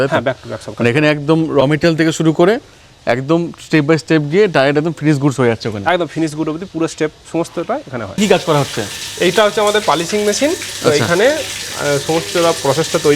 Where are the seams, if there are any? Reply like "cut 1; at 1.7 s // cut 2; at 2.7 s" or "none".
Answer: cut 1; at 8.2 s